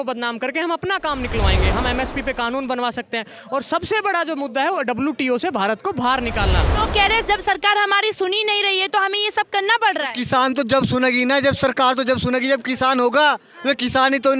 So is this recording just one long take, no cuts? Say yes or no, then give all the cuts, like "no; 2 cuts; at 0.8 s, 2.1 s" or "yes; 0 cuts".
no; 1 cut; at 6.8 s